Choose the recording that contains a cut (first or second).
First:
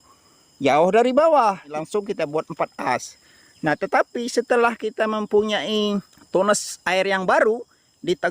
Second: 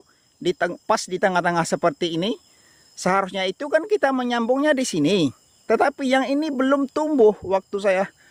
first